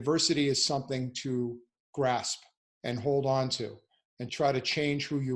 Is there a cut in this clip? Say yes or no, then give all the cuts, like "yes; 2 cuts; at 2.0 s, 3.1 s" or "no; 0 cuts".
yes; 1 cut; at 4.2 s